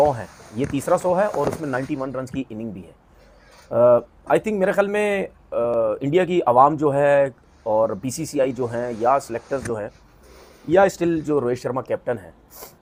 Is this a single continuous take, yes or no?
yes